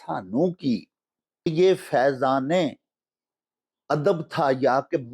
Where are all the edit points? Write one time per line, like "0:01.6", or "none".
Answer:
0:01.5